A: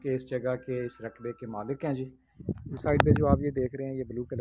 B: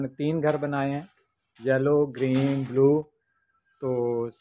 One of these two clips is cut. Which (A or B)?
A